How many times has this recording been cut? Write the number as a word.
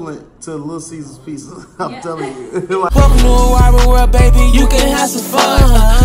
one